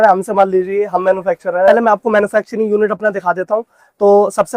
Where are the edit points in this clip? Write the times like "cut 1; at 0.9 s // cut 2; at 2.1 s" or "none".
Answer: cut 1; at 1.7 s